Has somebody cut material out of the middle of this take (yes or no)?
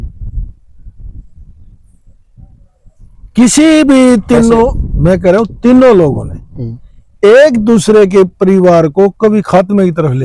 no